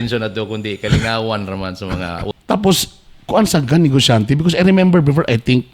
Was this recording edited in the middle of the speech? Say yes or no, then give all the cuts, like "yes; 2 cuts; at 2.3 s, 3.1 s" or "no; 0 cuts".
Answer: yes; 1 cut; at 2.3 s